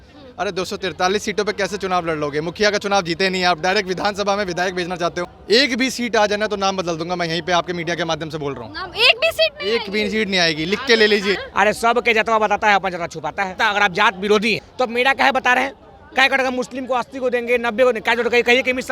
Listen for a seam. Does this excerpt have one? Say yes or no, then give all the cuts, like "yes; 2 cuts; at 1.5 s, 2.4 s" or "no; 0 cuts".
yes; 4 cuts; at 5.3 s, 11.4 s, 13.6 s, 14.6 s